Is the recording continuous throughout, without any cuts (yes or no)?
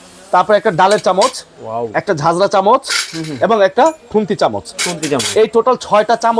yes